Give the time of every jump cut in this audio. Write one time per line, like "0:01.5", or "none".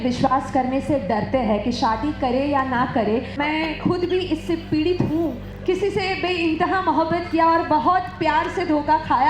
0:03.3
0:05.5